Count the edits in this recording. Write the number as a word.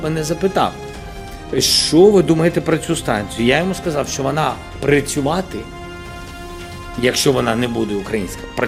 zero